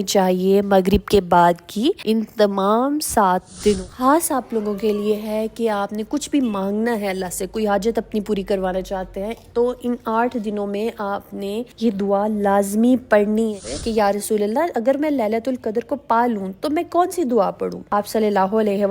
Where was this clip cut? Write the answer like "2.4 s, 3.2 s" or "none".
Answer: 3.9 s, 13.5 s